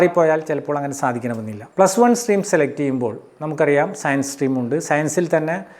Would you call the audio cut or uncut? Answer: cut